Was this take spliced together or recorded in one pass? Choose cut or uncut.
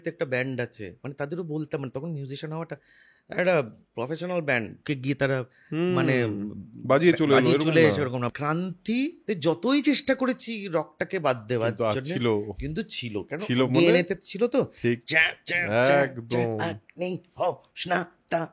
cut